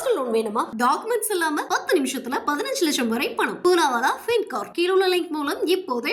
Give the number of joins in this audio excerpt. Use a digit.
0